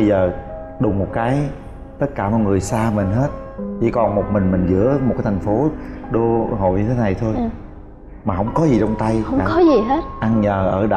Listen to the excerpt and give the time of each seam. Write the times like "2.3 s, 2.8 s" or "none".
none